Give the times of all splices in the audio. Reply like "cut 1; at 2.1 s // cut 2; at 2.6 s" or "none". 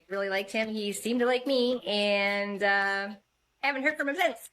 none